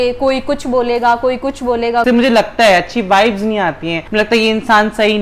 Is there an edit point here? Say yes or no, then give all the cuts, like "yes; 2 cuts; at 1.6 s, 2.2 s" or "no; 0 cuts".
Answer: yes; 1 cut; at 2.0 s